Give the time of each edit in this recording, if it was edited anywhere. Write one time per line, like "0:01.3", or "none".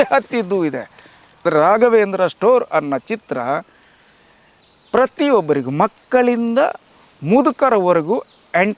0:01.4